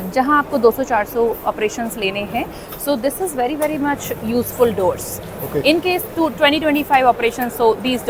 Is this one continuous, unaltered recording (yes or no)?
yes